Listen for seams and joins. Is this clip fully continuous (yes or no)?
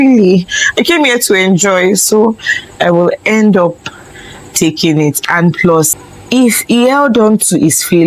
no